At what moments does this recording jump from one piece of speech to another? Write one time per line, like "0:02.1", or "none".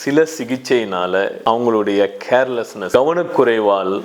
0:01.4
0:02.8

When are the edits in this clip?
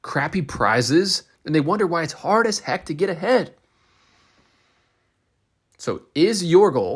0:01.3

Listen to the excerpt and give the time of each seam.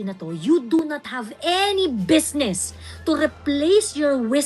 none

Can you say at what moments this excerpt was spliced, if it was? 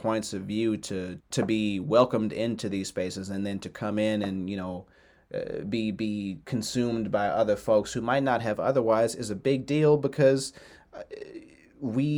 none

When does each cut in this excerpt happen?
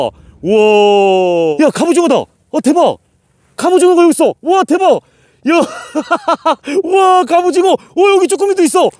0:01.5

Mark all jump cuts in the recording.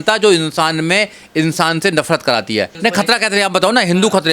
0:02.7

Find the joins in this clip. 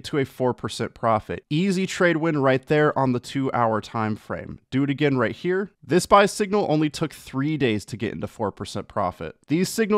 0:01.4

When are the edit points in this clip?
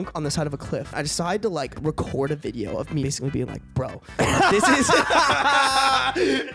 0:01.0
0:01.8
0:03.0

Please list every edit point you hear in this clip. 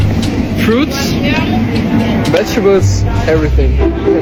none

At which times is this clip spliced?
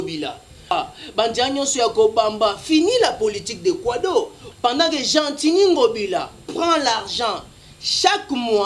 0:00.7
0:04.4

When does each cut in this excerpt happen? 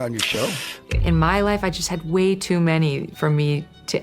0:00.9

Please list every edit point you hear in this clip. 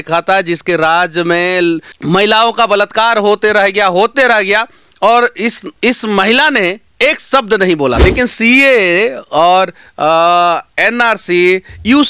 0:01.9
0:05.7
0:08.0

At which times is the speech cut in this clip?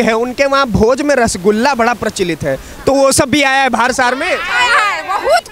none

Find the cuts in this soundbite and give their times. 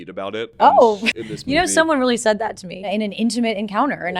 0:01.1
0:02.9

